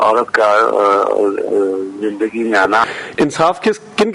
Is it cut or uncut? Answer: cut